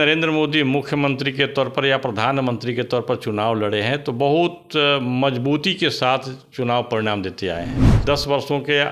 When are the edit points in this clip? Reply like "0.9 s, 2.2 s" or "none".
8.0 s